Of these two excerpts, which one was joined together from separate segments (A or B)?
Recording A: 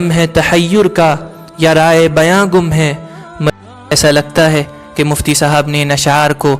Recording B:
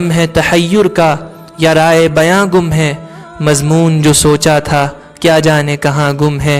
A